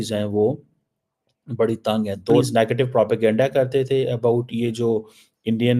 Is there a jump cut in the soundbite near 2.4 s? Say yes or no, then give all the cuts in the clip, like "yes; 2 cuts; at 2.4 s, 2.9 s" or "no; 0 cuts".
yes; 1 cut; at 2.4 s